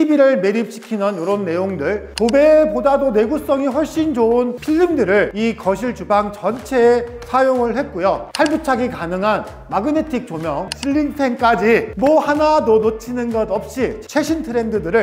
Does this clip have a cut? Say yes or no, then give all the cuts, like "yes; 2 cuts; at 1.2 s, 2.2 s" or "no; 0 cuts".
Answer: yes; 1 cut; at 10.6 s